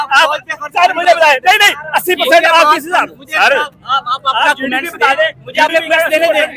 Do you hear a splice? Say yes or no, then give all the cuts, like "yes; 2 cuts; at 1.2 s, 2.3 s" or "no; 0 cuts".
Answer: no; 0 cuts